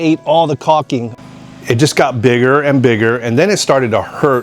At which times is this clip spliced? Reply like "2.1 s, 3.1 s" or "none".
1.1 s

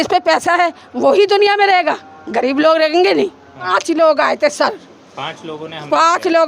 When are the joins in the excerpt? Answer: 3.7 s

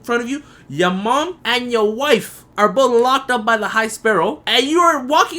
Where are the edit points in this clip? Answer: 1.4 s, 2.4 s, 4.4 s

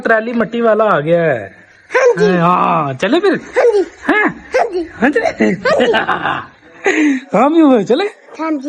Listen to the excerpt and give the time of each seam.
none

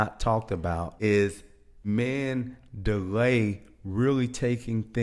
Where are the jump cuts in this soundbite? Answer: 0.9 s, 1.9 s

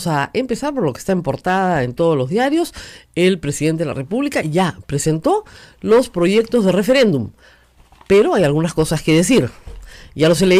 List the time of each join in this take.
none

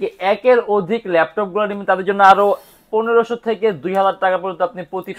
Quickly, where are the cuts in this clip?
none

